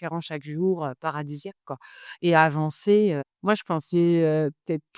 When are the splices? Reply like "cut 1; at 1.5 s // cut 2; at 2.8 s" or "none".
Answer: cut 1; at 3.3 s